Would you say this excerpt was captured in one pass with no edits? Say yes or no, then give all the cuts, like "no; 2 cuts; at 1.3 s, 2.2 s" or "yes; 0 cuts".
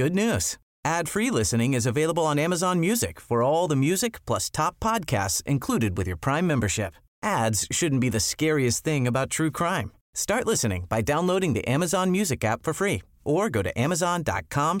yes; 0 cuts